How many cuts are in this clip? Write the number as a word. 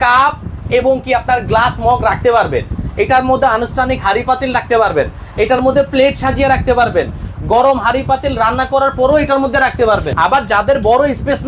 one